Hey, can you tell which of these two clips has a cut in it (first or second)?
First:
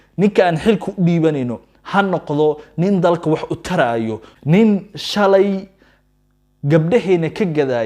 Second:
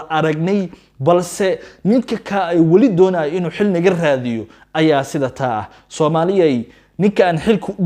first